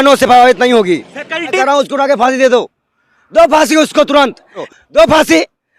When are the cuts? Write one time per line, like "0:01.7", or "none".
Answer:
0:01.5
0:04.6